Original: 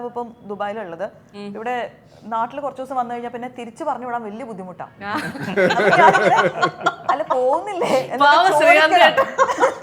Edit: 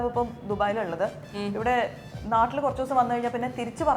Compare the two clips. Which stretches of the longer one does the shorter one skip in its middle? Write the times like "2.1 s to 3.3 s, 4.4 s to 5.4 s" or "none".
none